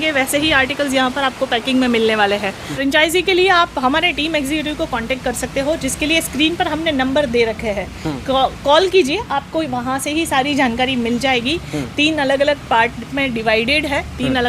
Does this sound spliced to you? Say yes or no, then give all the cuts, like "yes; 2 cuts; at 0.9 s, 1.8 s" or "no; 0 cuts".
yes; 1 cut; at 2.7 s